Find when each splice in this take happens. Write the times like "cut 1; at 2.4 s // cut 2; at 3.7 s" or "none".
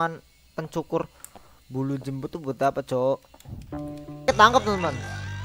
cut 1; at 4.3 s

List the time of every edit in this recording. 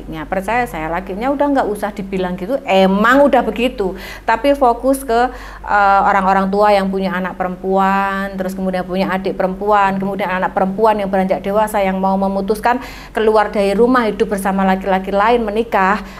none

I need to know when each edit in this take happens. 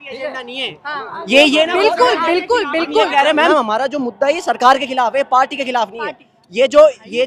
cut 1; at 3.5 s

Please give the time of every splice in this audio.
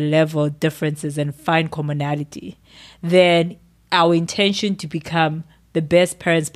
none

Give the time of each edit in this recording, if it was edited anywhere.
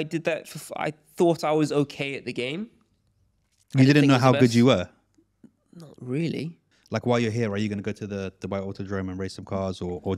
cut 1; at 6.7 s

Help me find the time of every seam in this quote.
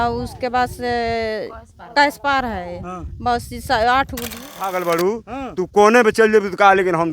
cut 1; at 4.7 s

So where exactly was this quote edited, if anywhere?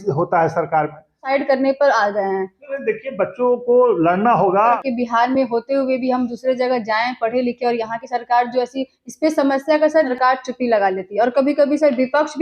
cut 1; at 1.2 s // cut 2; at 4.8 s // cut 3; at 10.1 s

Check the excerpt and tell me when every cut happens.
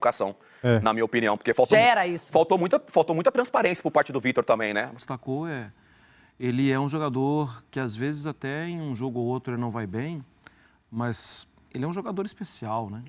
cut 1; at 5.0 s

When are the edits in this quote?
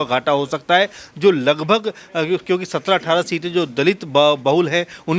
none

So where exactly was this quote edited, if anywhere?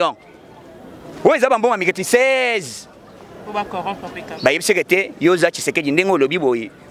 none

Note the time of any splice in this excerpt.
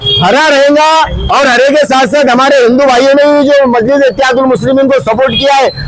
none

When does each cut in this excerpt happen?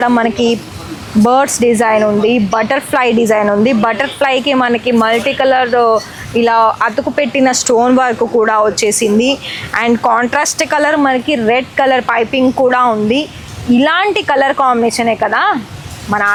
none

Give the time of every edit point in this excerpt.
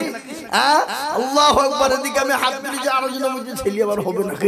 none

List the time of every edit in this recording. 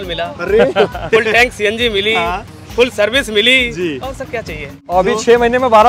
cut 1; at 4.8 s

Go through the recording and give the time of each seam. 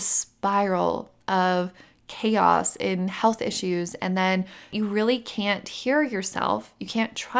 cut 1; at 4.7 s

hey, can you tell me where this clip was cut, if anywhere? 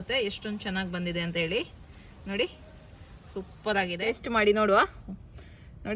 cut 1; at 4.0 s

